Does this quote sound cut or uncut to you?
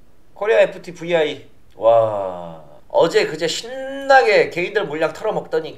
uncut